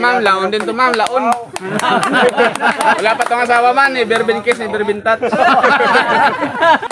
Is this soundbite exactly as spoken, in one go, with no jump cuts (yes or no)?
yes